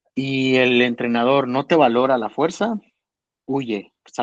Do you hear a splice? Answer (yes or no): no